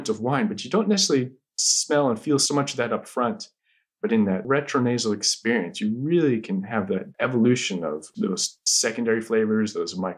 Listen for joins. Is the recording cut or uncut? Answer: cut